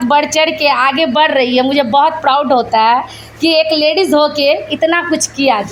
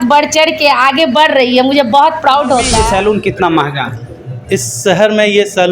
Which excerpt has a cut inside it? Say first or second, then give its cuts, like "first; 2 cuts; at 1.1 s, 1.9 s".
second; 1 cut; at 2.7 s